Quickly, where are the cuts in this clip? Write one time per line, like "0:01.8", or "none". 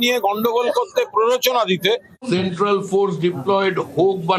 0:02.1